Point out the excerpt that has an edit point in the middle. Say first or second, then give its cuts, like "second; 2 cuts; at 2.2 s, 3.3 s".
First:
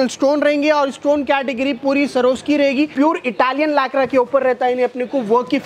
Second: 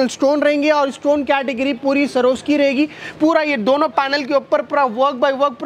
first; 1 cut; at 2.9 s